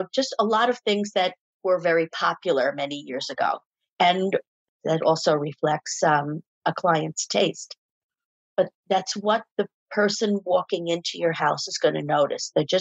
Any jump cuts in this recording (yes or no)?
no